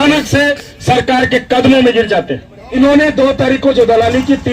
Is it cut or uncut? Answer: cut